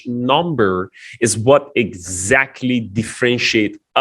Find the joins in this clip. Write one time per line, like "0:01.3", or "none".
none